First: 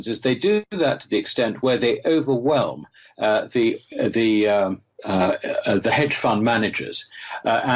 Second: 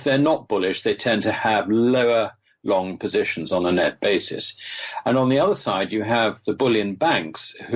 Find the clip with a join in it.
first; 1 cut; at 5.9 s

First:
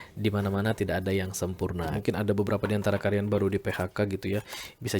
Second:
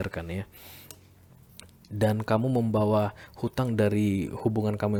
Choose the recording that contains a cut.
first; 1 cut; at 1.9 s

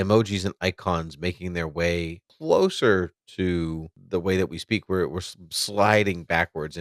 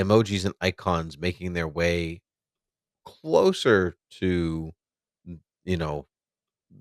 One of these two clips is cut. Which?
first; 2 cuts; at 2.2 s, 3.9 s

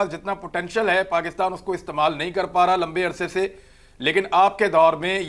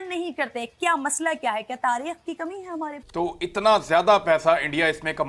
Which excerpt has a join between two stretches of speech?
second; 1 cut; at 3.0 s

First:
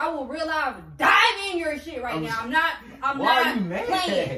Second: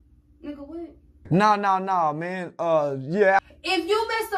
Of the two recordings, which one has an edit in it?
second; 1 cut; at 3.4 s

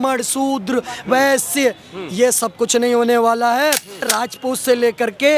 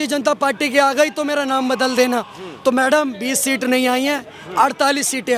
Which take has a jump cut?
first; 1 cut; at 4.1 s

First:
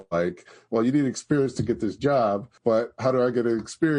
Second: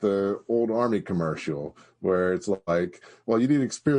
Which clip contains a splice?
first; 1 cut; at 2.5 s

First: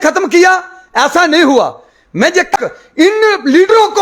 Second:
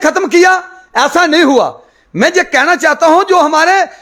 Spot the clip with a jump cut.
first; 1 cut; at 2.5 s

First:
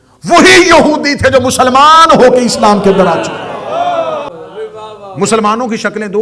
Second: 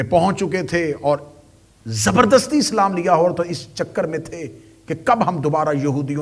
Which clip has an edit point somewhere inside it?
first; 1 cut; at 4.3 s

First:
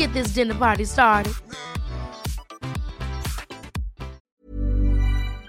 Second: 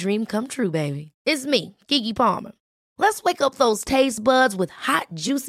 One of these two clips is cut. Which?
first; 1 cut; at 4.3 s

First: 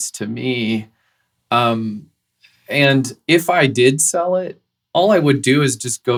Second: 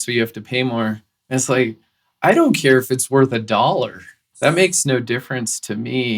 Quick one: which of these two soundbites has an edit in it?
second; 1 cut; at 4.3 s

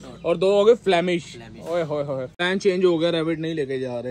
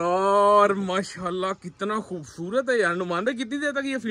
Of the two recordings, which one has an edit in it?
first; 1 cut; at 2.3 s

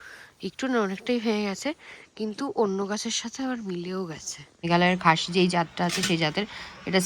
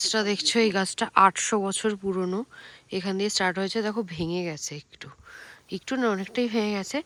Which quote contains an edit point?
first; 1 cut; at 4.7 s

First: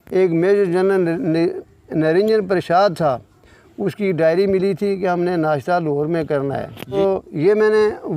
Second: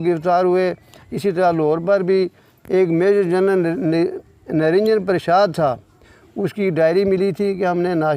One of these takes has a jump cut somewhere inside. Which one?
first; 1 cut; at 7.0 s

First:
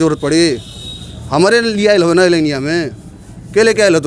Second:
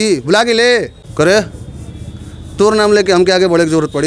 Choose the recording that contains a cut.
second; 1 cut; at 1.0 s

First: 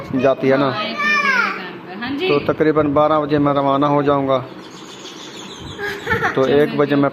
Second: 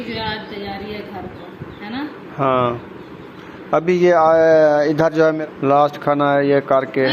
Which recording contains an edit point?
second; 1 cut; at 5.4 s

